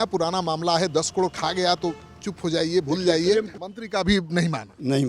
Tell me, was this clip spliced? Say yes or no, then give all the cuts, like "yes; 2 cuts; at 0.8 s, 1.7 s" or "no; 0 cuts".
yes; 1 cut; at 3.6 s